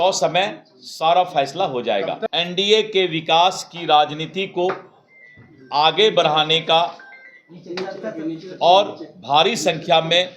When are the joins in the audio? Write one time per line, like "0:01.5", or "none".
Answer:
0:02.2